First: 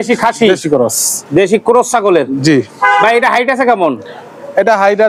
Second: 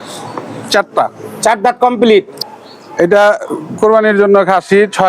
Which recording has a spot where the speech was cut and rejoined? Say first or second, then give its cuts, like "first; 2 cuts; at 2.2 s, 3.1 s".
second; 1 cut; at 2.4 s